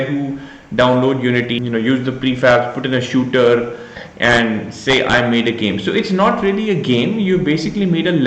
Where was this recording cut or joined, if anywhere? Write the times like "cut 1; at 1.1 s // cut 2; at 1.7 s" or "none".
cut 1; at 1.5 s